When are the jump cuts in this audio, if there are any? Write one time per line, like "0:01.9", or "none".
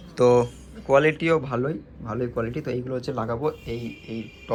none